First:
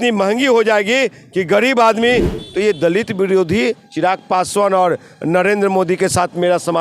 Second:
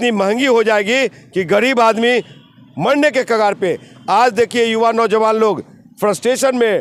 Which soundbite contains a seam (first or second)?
first